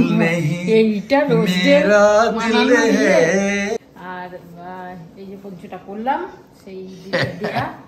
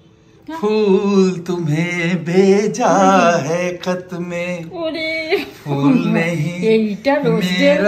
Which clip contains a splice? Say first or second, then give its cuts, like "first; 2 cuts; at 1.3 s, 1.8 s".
first; 1 cut; at 3.8 s